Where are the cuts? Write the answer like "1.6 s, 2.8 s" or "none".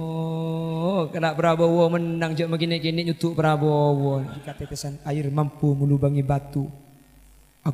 4.9 s